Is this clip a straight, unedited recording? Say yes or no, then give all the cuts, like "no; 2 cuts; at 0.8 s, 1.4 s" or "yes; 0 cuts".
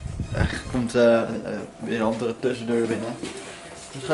yes; 0 cuts